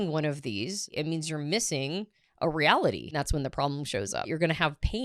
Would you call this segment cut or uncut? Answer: cut